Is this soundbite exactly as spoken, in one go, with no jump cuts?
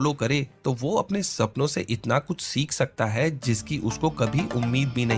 yes; 0 cuts

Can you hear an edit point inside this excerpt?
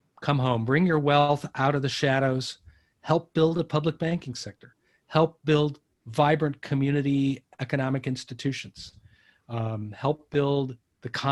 no; 0 cuts

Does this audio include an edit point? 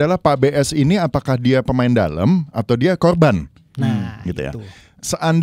no; 0 cuts

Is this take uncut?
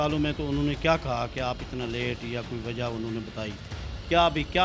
yes; 0 cuts

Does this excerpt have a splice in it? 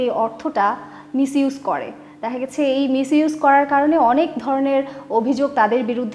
no; 0 cuts

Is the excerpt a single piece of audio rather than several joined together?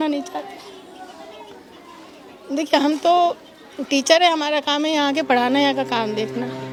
yes; 0 cuts

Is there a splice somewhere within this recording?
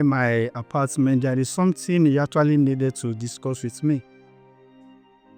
no; 0 cuts

